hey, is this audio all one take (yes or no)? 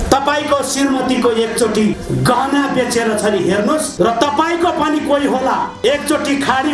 no